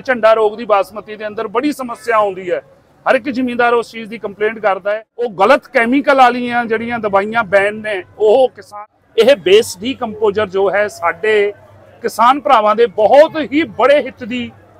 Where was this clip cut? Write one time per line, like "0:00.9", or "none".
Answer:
0:05.3
0:08.7